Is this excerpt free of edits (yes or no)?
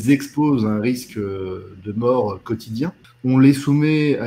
no